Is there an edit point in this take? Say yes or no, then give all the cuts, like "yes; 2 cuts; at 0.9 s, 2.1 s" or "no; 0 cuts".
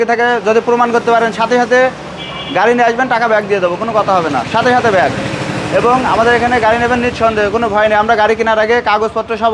no; 0 cuts